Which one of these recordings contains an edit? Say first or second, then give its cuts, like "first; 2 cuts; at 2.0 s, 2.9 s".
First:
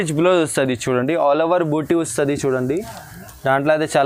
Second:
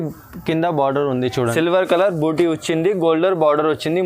second; 1 cut; at 1.5 s